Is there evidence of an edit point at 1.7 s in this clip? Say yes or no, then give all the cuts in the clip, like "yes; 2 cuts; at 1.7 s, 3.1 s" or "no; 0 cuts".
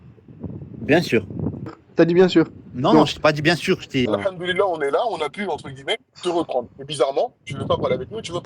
yes; 2 cuts; at 1.7 s, 4.1 s